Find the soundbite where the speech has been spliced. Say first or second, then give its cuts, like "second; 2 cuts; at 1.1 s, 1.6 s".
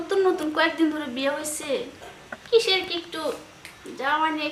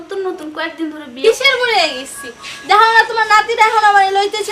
second; 1 cut; at 1.2 s